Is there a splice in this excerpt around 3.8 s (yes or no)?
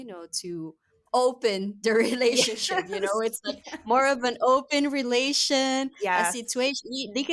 no